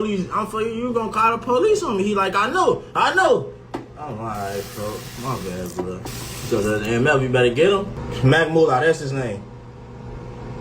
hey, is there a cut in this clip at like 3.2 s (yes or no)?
yes